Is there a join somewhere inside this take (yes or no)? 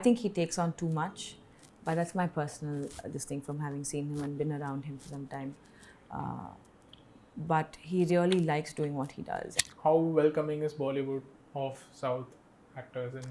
yes